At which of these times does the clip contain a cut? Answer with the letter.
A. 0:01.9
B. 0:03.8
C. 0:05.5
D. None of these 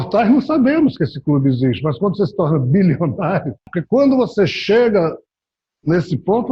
B